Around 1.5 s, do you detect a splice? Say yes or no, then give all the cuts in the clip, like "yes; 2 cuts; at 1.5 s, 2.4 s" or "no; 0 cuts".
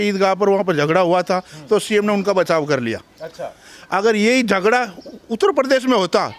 no; 0 cuts